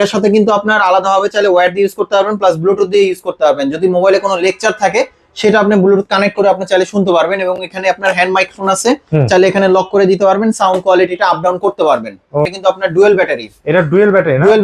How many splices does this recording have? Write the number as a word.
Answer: one